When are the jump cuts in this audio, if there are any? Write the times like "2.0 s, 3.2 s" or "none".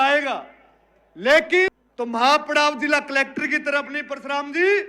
1.8 s